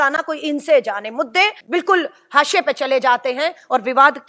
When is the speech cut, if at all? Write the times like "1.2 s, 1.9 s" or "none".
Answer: 1.6 s

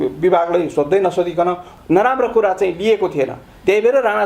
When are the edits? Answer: 1.7 s

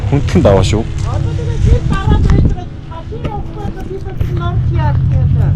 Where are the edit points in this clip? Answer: none

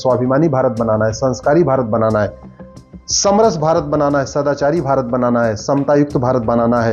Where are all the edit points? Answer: none

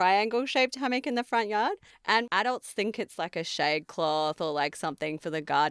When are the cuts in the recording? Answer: 2.1 s

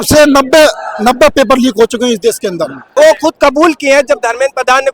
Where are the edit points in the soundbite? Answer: 2.8 s

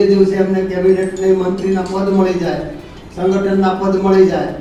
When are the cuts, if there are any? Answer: none

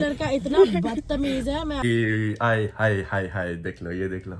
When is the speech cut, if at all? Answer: 1.9 s

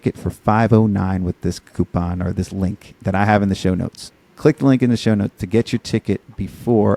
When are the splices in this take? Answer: none

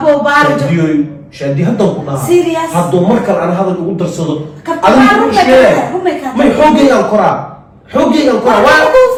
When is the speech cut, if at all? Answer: none

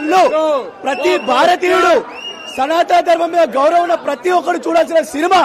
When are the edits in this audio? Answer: none

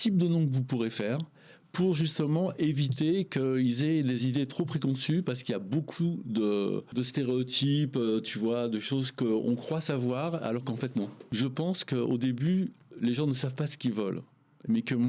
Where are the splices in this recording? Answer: 6.9 s, 11.2 s

